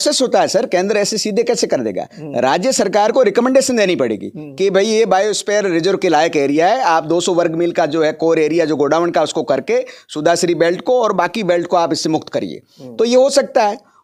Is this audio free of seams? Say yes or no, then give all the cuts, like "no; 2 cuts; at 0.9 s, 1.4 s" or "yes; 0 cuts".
yes; 0 cuts